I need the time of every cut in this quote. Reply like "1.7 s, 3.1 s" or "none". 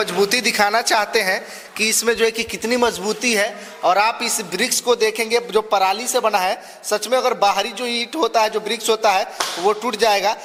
none